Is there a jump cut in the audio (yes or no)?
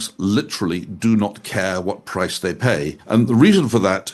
yes